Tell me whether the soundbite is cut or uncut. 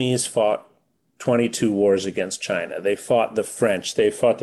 uncut